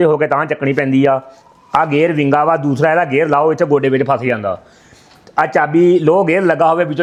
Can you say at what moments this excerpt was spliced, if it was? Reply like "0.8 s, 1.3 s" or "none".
none